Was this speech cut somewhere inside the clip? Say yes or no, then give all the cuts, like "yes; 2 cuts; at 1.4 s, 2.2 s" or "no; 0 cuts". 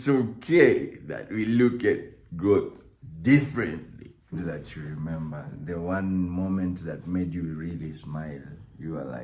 yes; 1 cut; at 4.3 s